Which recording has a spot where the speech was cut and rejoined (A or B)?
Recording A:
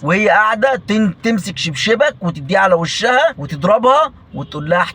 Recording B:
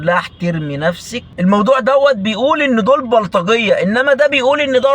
B